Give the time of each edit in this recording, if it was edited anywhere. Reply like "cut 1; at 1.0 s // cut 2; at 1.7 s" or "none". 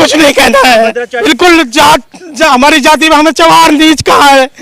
cut 1; at 1.1 s